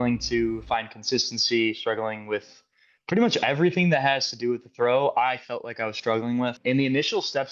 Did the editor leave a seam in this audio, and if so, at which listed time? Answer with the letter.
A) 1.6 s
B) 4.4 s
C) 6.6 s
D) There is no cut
C